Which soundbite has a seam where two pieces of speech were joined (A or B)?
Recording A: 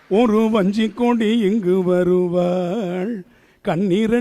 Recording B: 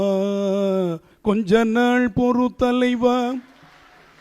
B